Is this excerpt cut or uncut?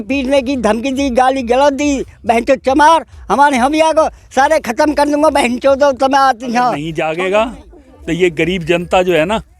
cut